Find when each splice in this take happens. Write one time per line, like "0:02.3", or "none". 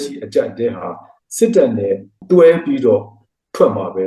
0:02.1

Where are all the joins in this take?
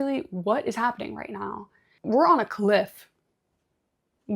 0:01.9

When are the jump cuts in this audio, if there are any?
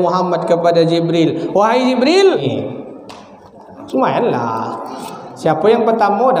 0:02.4

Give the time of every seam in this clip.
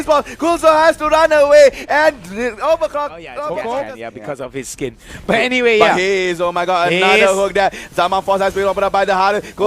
0:04.1

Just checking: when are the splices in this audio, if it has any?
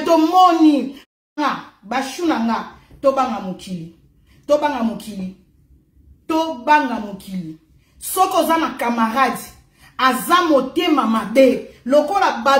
0:00.9

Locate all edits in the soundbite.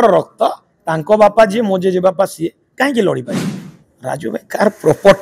0:03.4

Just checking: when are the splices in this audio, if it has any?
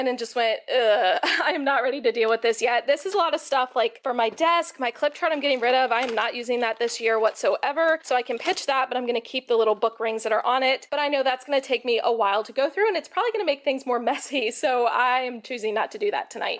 none

